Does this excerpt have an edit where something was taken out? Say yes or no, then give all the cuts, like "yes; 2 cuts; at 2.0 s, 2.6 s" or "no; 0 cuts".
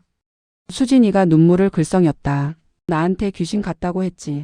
yes; 1 cut; at 2.9 s